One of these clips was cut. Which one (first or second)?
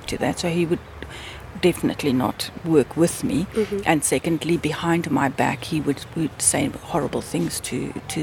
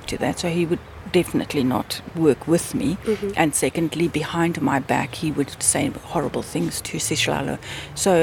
second